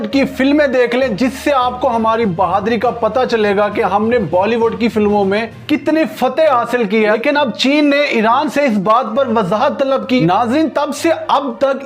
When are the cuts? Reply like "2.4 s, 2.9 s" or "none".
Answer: 7.1 s, 10.2 s